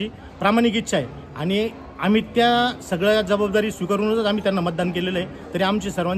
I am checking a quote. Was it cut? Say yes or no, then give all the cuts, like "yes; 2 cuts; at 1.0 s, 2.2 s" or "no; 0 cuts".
no; 0 cuts